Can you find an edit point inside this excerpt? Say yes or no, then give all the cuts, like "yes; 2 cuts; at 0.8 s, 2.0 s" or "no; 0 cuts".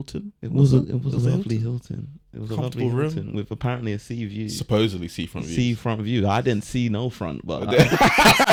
no; 0 cuts